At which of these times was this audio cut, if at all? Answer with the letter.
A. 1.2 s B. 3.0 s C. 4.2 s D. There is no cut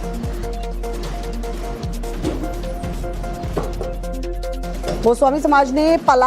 B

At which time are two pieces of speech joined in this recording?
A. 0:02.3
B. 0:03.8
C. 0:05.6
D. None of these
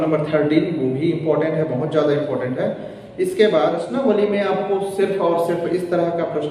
B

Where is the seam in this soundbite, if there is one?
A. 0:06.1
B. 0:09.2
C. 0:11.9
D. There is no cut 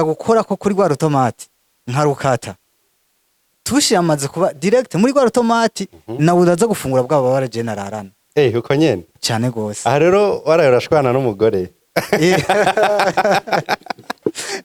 D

